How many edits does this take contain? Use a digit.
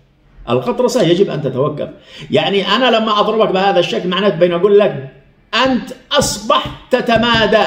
0